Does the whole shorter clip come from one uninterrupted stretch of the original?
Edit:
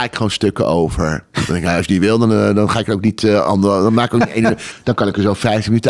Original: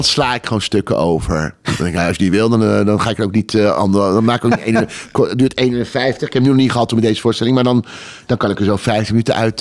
no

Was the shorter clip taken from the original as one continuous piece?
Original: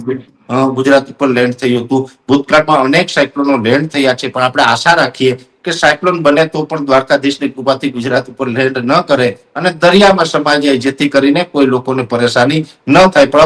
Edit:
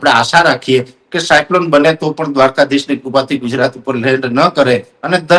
yes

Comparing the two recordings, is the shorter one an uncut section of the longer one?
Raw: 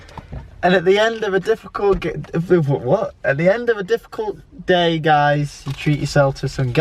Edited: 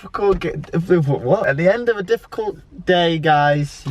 no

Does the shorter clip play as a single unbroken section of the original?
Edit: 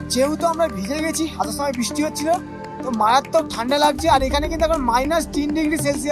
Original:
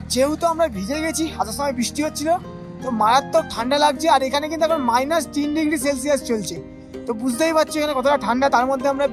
yes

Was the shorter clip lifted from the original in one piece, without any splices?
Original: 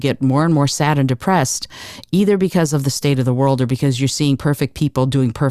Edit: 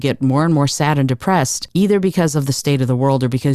no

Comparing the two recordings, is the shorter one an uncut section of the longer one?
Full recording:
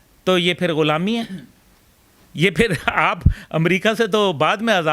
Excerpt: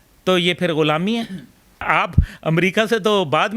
no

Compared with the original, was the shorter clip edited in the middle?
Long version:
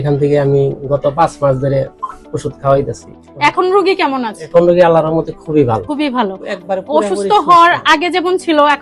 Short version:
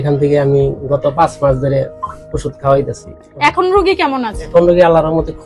no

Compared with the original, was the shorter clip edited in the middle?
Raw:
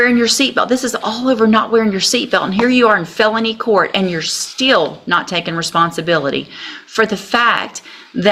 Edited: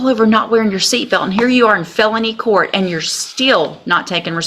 no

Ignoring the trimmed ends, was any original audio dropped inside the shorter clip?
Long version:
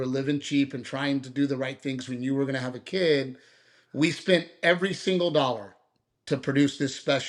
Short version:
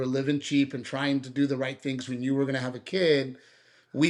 no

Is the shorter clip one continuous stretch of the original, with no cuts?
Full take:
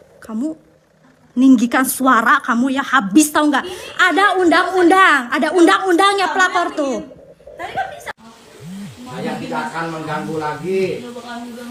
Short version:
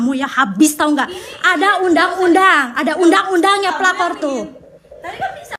yes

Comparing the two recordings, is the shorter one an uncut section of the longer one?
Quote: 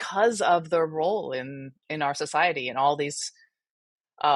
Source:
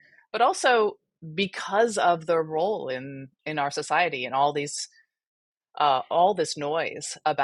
yes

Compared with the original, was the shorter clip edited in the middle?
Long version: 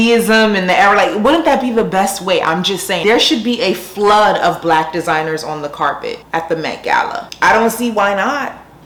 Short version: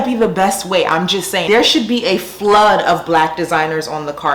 no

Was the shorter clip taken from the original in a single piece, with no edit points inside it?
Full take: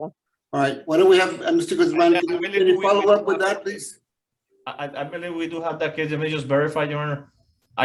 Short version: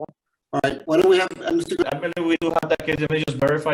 no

